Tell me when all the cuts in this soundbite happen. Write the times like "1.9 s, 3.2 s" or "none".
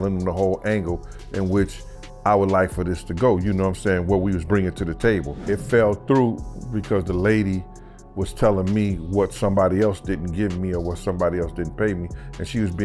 5.4 s